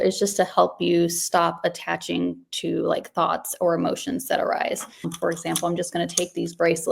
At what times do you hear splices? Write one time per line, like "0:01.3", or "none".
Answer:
0:05.1